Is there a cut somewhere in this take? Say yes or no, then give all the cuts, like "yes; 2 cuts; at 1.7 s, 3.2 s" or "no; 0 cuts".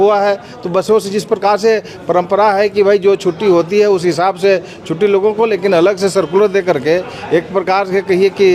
no; 0 cuts